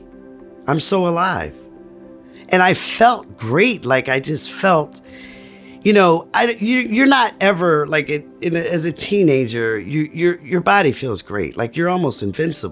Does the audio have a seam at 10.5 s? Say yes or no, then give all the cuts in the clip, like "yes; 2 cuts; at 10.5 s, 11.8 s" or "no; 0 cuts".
no; 0 cuts